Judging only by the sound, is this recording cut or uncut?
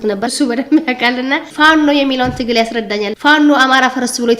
uncut